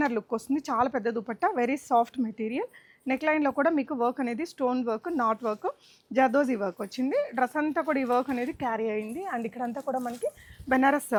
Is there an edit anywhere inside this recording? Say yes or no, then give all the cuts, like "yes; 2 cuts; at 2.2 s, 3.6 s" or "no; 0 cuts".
no; 0 cuts